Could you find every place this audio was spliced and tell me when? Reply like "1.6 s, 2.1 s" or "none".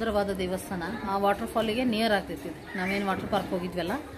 1.1 s